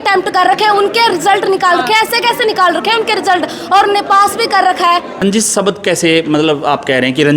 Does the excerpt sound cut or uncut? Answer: cut